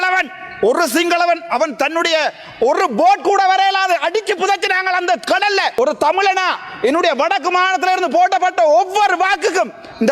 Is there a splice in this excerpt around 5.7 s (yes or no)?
yes